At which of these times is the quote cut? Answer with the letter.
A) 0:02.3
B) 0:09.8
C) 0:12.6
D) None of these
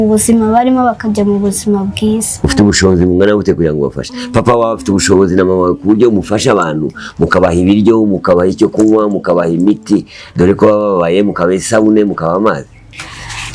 A